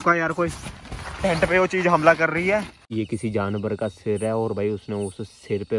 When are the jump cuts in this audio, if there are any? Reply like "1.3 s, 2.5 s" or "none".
2.8 s